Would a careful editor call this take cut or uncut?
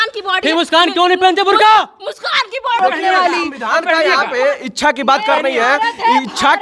cut